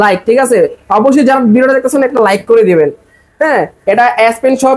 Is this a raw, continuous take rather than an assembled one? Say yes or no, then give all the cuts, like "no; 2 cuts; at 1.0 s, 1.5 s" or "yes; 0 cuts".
yes; 0 cuts